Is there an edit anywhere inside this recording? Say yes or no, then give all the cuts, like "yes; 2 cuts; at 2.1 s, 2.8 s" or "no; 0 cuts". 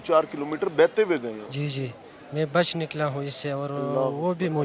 no; 0 cuts